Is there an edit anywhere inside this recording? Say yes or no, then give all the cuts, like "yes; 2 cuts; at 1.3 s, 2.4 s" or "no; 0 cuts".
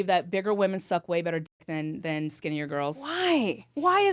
no; 0 cuts